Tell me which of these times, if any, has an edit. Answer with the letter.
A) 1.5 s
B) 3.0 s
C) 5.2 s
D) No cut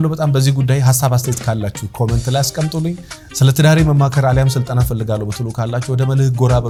D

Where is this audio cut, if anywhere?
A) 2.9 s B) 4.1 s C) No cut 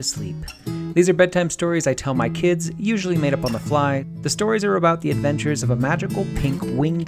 B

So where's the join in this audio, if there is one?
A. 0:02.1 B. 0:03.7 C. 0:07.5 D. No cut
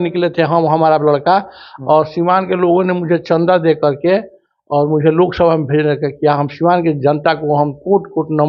D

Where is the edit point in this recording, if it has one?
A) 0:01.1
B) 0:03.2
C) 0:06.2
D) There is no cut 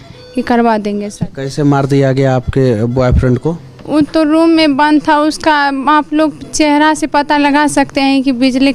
A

